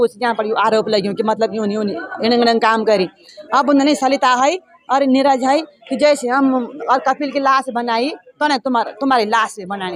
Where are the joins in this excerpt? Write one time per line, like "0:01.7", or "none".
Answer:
none